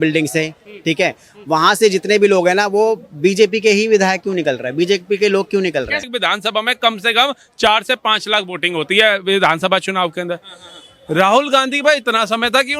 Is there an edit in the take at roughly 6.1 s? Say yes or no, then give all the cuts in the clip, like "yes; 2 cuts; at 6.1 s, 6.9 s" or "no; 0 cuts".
yes; 1 cut; at 6.1 s